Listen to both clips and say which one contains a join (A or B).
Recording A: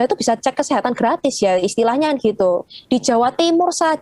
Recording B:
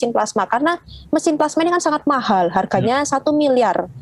A